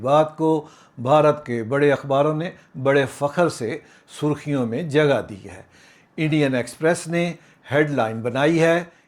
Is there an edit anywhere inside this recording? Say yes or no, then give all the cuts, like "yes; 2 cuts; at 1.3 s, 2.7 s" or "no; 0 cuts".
no; 0 cuts